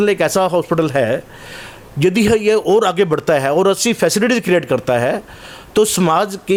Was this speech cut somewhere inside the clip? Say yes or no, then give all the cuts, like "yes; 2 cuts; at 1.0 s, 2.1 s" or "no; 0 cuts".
no; 0 cuts